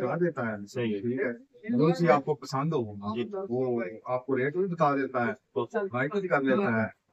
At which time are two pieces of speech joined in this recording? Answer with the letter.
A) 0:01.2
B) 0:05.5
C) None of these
C